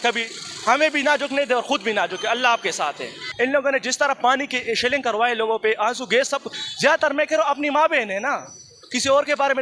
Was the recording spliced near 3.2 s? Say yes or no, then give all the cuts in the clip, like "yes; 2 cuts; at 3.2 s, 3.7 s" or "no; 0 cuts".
yes; 1 cut; at 3.2 s